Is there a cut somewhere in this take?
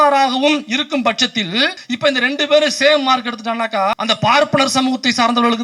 yes; 2 cuts; at 1.8 s, 3.9 s

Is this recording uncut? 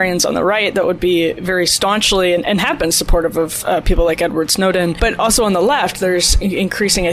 yes; 0 cuts

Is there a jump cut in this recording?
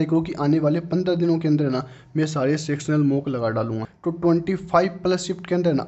yes; 1 cut; at 3.9 s

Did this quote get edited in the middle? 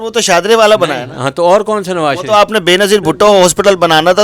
no; 0 cuts

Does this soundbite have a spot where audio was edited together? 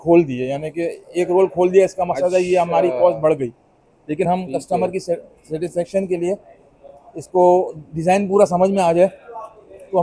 no; 0 cuts

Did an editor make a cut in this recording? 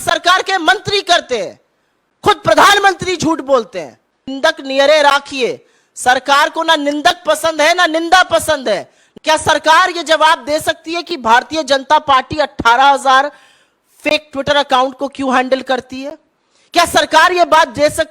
yes; 2 cuts; at 4.3 s, 9.0 s

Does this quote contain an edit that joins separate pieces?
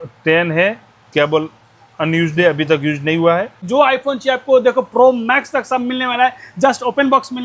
yes; 1 cut; at 3.6 s

